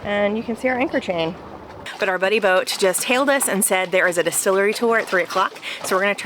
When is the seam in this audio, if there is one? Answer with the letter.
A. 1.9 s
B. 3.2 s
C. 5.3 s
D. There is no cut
A